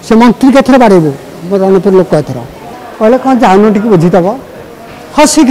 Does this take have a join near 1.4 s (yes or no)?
no